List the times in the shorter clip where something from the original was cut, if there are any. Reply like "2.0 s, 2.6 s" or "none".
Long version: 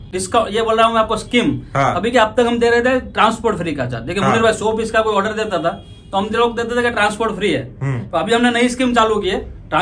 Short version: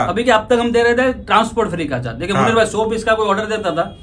none